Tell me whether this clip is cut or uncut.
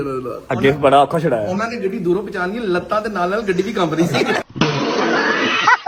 uncut